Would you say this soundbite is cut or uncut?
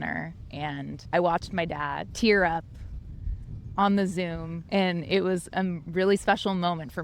cut